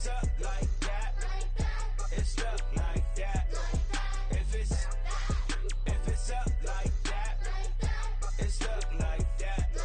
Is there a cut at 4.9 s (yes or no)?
yes